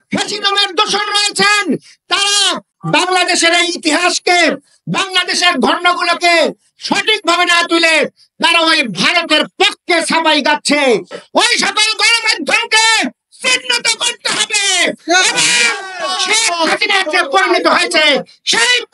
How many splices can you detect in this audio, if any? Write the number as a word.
one